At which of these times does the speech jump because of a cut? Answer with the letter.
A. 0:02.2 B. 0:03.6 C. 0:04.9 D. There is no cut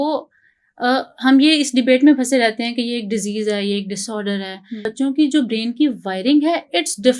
C